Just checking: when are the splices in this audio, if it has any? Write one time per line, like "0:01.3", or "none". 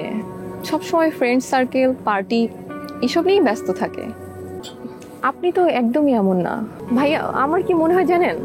0:04.7
0:06.8